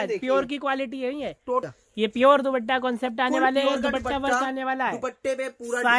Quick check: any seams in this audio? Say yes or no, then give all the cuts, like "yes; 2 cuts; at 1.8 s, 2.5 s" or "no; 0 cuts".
yes; 1 cut; at 1.7 s